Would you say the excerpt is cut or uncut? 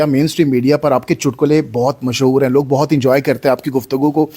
uncut